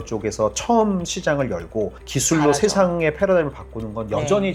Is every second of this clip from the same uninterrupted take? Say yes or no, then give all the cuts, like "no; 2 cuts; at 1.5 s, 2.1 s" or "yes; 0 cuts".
yes; 0 cuts